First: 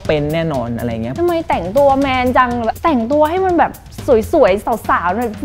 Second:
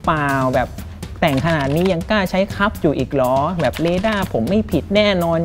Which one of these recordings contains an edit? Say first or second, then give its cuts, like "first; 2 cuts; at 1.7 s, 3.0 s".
first; 2 cuts; at 1.1 s, 2.8 s